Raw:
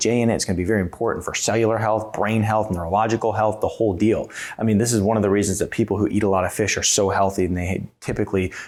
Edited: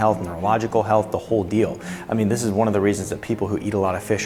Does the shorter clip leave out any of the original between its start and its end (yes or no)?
no